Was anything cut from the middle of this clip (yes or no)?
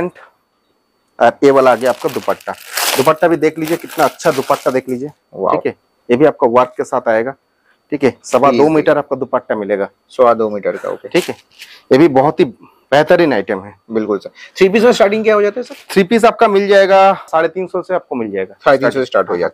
no